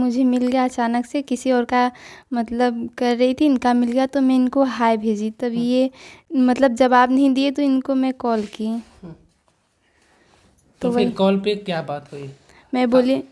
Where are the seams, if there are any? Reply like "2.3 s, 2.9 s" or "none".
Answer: none